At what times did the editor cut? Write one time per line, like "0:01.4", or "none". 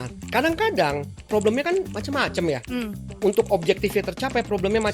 0:02.0
0:03.0